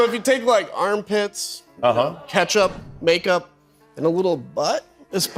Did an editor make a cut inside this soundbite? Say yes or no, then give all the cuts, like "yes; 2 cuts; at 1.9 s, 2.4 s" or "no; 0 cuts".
no; 0 cuts